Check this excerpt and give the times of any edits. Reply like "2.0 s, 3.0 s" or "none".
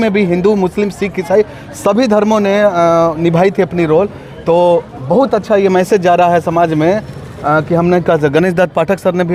none